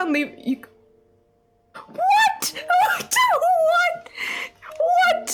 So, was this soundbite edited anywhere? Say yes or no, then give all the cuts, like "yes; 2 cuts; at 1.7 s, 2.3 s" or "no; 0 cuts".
no; 0 cuts